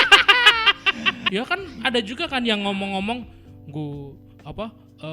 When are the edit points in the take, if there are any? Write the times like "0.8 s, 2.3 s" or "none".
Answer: 1.2 s